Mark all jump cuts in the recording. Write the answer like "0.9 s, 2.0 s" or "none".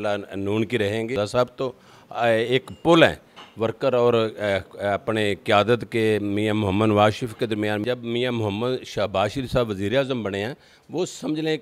1.1 s, 7.8 s